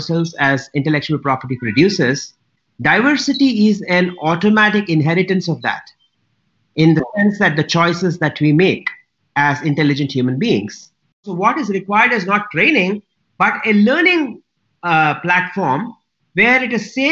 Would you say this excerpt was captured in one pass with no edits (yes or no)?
no